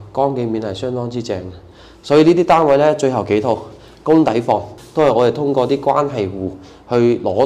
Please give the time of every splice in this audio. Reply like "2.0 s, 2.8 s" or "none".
4.8 s